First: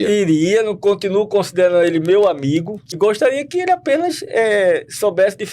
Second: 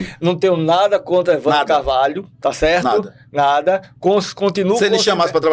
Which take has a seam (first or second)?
first